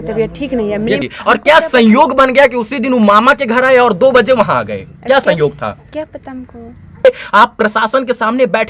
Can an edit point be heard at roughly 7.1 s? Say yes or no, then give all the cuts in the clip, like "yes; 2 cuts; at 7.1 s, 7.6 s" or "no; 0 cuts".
yes; 2 cuts; at 1.1 s, 7.1 s